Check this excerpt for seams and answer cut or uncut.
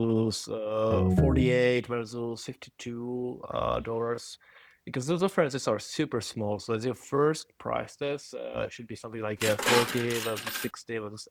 uncut